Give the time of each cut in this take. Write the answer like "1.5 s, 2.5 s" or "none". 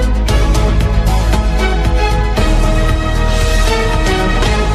none